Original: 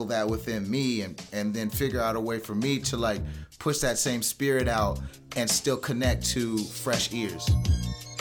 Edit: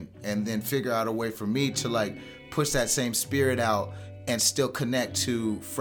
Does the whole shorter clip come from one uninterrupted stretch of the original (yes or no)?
yes